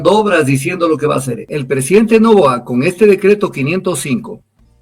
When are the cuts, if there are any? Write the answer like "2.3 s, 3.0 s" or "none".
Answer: 1.5 s